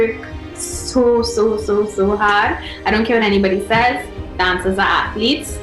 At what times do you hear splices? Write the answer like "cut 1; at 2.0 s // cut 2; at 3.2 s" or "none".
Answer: none